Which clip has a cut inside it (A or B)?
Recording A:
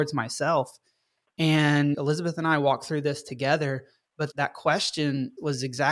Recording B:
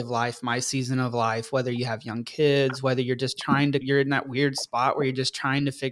A